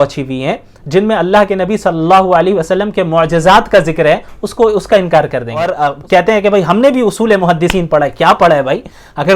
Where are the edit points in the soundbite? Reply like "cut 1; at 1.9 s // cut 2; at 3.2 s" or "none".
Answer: cut 1; at 5.7 s